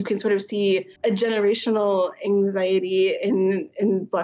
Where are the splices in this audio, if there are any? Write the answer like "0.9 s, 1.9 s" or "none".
0.9 s